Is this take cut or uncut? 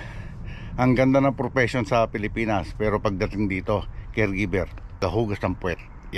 cut